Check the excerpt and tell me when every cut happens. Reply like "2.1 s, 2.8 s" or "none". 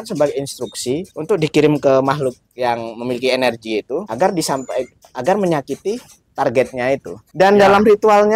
1.1 s, 4.1 s, 7.2 s